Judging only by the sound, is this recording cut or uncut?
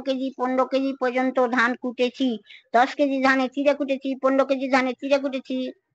uncut